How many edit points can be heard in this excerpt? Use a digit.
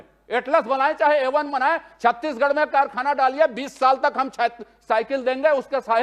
0